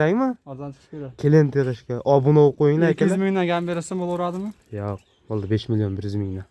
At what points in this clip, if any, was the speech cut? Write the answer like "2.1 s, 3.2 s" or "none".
none